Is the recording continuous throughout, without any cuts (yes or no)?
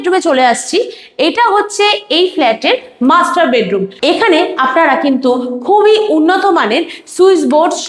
no